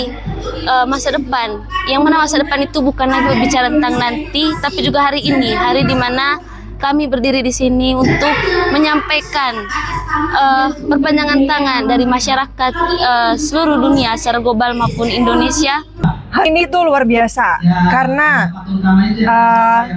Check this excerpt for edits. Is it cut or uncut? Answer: cut